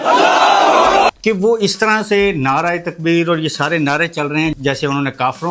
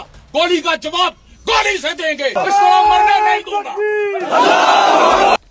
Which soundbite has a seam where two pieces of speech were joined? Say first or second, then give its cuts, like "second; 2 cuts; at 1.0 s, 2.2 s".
first; 1 cut; at 4.5 s